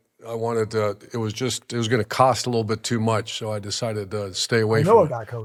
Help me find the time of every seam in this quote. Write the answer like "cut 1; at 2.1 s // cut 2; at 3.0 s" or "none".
none